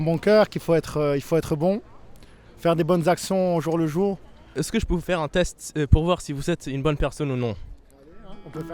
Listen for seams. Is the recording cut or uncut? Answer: cut